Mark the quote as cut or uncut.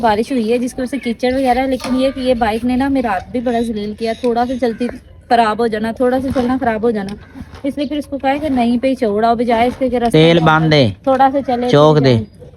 uncut